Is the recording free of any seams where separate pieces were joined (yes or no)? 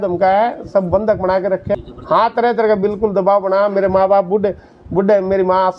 no